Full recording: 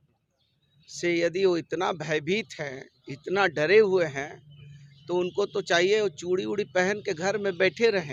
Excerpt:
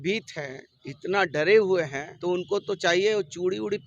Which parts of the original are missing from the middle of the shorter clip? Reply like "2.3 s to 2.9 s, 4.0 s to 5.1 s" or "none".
4.3 s to 4.9 s